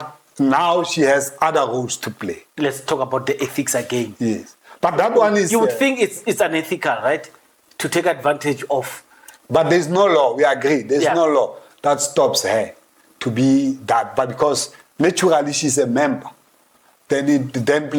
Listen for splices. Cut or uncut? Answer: uncut